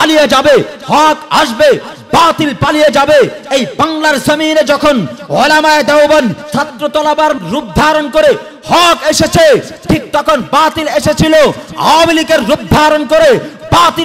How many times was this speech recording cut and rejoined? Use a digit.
2